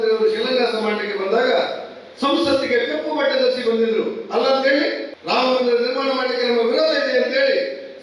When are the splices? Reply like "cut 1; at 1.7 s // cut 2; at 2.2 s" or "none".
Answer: cut 1; at 5.1 s

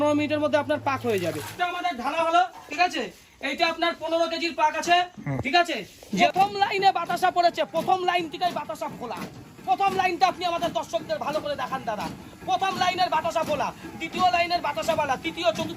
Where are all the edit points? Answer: cut 1; at 1.4 s // cut 2; at 6.0 s

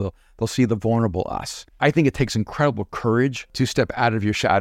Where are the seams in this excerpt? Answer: cut 1; at 1.8 s // cut 2; at 3.4 s

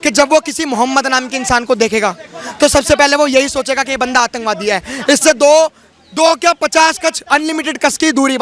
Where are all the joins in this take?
none

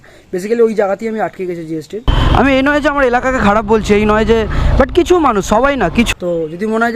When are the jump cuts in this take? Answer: cut 1; at 2.1 s // cut 2; at 6.1 s

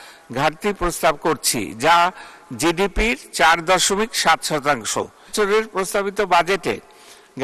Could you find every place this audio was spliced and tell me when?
cut 1; at 5.3 s

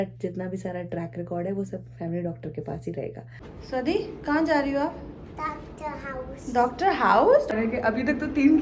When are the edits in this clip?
cut 1; at 3.5 s // cut 2; at 7.5 s

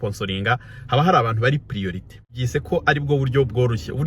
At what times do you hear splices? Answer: cut 1; at 2.4 s

